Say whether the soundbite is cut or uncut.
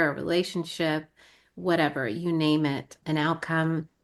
uncut